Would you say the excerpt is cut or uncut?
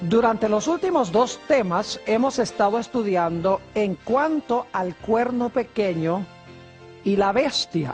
uncut